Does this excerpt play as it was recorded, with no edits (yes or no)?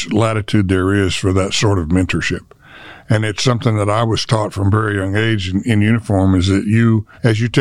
yes